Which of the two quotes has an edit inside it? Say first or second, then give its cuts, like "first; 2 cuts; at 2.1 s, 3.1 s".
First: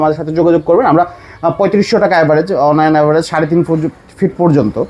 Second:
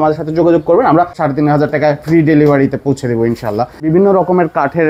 second; 2 cuts; at 1.2 s, 3.9 s